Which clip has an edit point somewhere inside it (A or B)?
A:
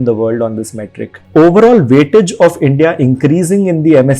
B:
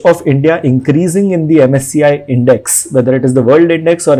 A